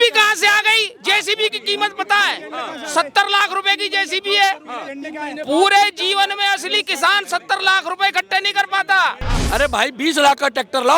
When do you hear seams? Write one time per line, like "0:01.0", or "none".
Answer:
0:09.3